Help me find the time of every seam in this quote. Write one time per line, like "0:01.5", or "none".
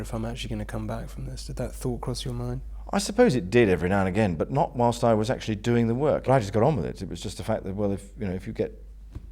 0:02.7
0:06.3